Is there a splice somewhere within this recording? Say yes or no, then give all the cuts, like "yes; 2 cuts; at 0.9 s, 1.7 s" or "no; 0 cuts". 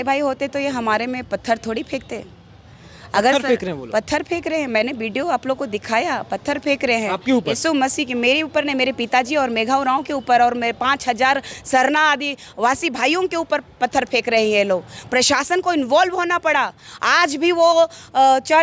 no; 0 cuts